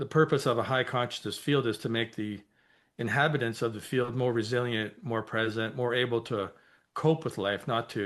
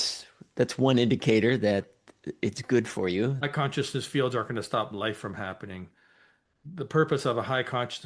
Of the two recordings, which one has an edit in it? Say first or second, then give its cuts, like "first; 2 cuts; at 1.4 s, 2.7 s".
second; 1 cut; at 3.4 s